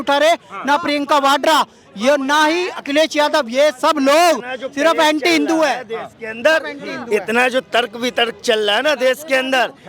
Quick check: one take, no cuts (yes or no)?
yes